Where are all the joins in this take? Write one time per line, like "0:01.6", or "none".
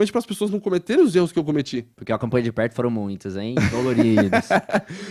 0:01.9